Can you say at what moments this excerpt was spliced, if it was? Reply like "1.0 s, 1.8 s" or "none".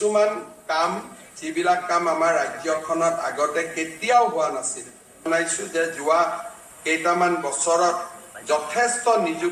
5.3 s